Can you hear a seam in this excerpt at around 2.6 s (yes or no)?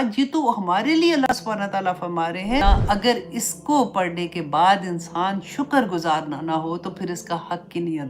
yes